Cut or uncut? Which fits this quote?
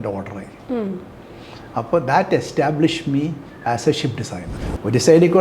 cut